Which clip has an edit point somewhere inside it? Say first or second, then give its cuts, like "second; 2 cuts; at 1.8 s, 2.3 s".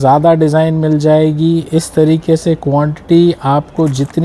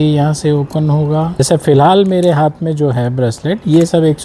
second; 1 cut; at 1.4 s